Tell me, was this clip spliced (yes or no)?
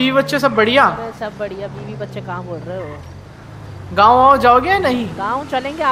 no